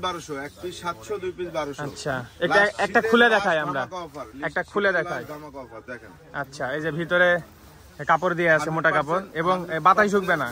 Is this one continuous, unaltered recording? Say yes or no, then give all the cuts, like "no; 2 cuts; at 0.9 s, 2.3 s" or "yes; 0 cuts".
yes; 0 cuts